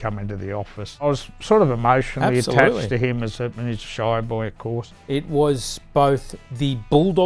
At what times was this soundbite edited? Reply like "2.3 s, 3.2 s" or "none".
1.1 s, 5.0 s